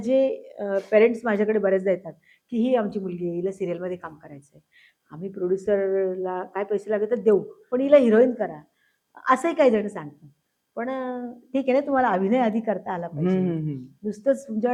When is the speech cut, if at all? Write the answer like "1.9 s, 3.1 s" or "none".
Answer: none